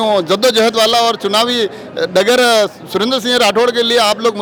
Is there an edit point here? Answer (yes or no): no